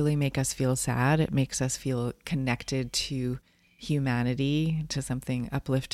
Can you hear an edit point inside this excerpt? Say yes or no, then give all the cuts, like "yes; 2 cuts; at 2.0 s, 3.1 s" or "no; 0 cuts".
no; 0 cuts